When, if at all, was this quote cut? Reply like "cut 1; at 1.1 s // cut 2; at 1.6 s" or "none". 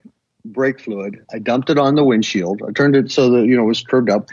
none